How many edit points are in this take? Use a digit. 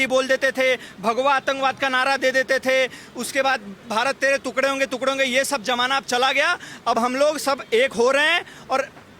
0